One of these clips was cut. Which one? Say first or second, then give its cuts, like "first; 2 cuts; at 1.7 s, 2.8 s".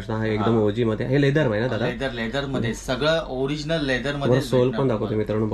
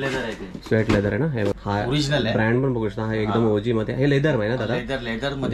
second; 1 cut; at 1.6 s